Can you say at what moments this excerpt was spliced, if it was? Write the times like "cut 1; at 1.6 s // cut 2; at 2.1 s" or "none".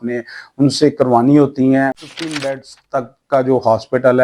cut 1; at 2.1 s